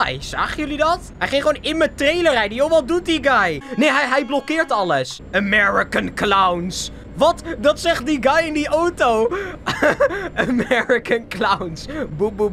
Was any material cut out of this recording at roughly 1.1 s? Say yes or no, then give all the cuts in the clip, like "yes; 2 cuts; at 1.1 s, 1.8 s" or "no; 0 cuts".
yes; 3 cuts; at 1.1 s, 3.6 s, 5.2 s